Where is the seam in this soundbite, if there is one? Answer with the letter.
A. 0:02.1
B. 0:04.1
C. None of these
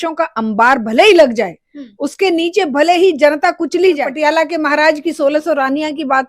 B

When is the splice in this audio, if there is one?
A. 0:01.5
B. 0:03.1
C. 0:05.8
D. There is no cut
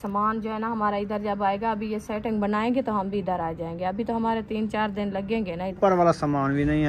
C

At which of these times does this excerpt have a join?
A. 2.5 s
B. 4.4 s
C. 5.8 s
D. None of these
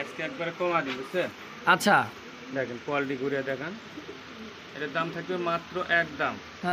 D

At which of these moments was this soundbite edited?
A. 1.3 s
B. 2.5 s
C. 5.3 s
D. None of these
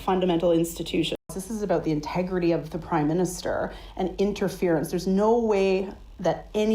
A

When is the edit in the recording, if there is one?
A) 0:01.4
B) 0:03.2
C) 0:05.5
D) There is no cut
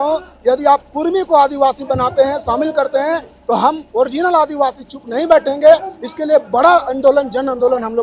D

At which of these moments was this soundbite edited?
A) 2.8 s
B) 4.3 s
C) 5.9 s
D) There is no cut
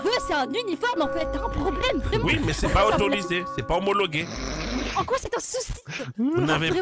D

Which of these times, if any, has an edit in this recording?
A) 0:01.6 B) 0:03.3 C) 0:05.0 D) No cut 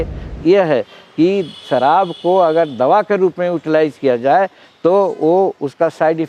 D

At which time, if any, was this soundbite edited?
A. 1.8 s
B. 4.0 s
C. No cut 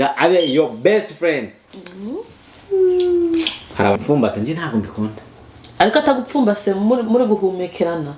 B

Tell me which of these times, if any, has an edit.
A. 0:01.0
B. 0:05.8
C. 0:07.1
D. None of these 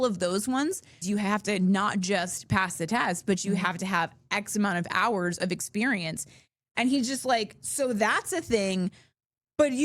A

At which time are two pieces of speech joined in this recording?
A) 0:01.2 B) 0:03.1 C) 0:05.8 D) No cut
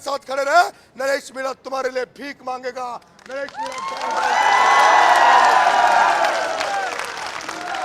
D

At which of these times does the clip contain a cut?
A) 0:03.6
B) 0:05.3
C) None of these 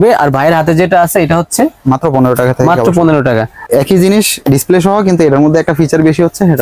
A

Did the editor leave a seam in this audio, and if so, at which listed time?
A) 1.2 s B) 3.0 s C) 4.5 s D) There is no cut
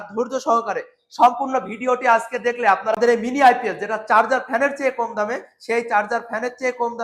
B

